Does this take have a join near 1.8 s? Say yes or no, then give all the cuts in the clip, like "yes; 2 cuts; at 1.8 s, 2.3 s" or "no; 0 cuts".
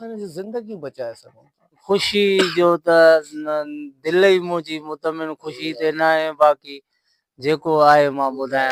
yes; 1 cut; at 1.8 s